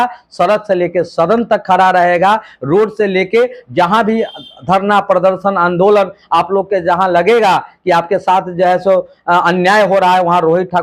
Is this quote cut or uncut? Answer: uncut